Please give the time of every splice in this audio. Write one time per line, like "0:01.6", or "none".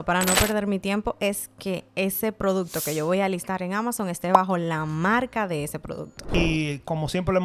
0:06.3